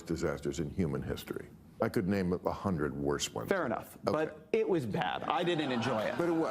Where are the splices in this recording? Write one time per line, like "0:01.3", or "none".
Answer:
0:01.8